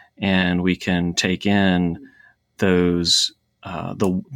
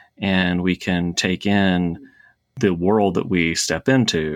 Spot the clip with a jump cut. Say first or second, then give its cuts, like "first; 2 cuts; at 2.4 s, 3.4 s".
second; 1 cut; at 2.5 s